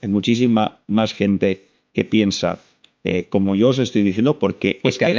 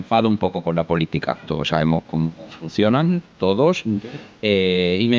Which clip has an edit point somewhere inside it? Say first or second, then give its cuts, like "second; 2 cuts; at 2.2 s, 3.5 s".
second; 1 cut; at 1.4 s